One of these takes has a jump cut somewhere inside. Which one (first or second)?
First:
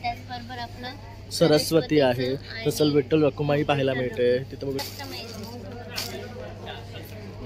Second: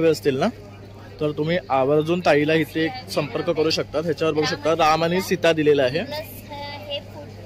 first